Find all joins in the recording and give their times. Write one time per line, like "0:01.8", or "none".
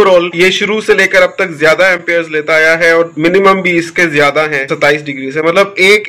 none